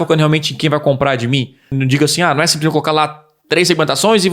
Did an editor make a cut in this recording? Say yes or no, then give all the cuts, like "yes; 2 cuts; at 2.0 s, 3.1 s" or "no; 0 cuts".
yes; 1 cut; at 1.7 s